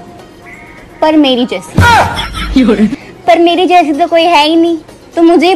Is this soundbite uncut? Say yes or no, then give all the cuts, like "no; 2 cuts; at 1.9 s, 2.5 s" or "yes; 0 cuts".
yes; 0 cuts